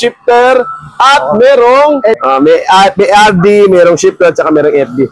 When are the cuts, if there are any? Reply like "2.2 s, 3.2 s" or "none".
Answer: 2.2 s